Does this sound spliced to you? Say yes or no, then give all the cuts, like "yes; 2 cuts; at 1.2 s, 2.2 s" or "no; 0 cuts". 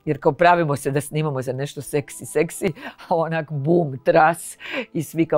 no; 0 cuts